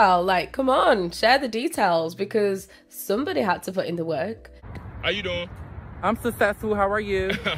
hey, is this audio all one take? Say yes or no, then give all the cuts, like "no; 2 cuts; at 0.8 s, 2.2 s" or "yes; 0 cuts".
yes; 0 cuts